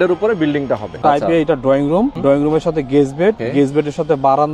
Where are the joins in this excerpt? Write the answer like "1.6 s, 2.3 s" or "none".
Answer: 0.9 s, 2.2 s, 3.4 s

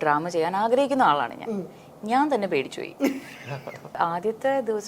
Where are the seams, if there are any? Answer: 4.0 s

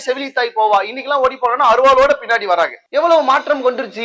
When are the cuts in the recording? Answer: none

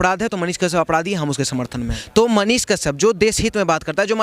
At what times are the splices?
2.0 s

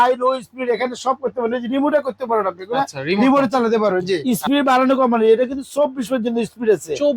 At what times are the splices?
4.2 s

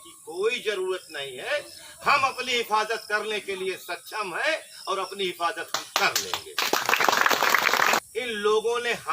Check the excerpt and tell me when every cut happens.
8.0 s

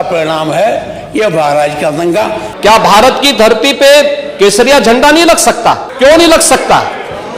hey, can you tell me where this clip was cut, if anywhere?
2.5 s, 5.9 s

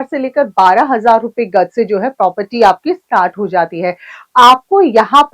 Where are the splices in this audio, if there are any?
none

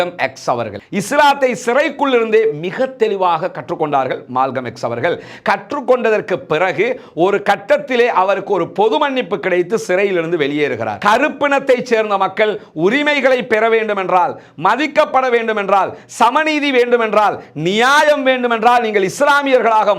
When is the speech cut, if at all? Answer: 0.8 s, 11.0 s

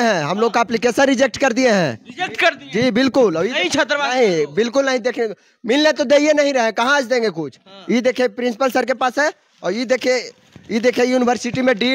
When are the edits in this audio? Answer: none

